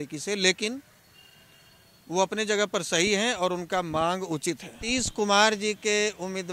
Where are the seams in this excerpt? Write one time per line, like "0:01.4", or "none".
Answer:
0:04.7